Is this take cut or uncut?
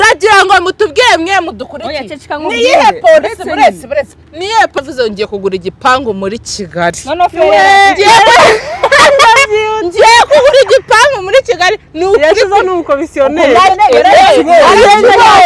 cut